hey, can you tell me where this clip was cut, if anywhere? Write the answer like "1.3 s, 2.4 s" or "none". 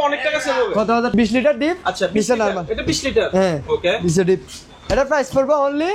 1.1 s